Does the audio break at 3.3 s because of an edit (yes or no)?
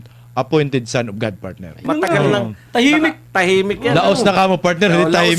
no